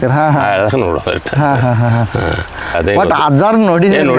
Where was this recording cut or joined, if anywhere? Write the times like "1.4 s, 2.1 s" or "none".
2.8 s